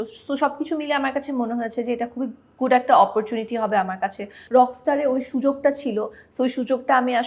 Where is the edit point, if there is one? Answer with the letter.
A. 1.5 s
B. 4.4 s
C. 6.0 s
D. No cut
B